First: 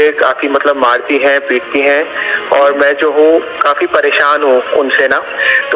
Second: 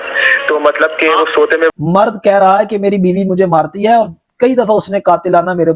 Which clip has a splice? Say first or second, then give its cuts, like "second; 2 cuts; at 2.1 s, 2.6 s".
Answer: second; 1 cut; at 1.8 s